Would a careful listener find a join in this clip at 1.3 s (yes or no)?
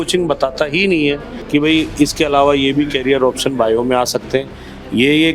yes